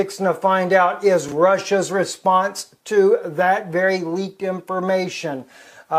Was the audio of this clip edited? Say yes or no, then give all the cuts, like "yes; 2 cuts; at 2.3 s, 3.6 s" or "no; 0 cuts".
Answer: no; 0 cuts